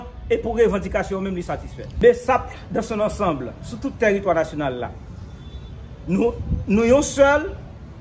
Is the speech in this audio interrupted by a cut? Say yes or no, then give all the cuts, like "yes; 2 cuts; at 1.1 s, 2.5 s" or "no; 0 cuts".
yes; 1 cut; at 1.8 s